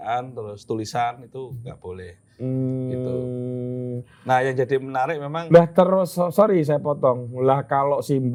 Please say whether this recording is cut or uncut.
uncut